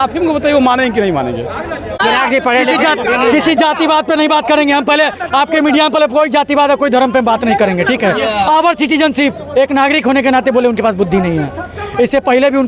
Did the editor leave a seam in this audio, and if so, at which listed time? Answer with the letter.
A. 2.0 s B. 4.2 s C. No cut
A